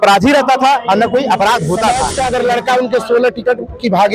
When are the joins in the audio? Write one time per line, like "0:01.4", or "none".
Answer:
0:02.1